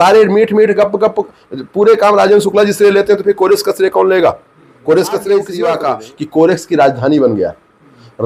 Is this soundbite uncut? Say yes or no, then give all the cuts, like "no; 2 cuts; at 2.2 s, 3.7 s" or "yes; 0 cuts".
no; 1 cut; at 5.5 s